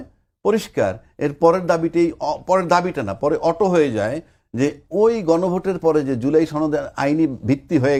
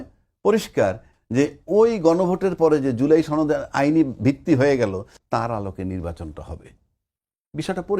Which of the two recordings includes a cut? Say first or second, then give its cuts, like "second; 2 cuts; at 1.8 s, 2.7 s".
second; 2 cuts; at 1.1 s, 5.1 s